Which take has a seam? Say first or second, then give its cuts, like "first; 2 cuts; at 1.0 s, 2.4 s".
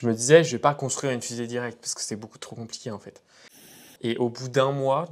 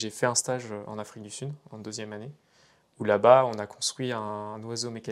first; 1 cut; at 3.7 s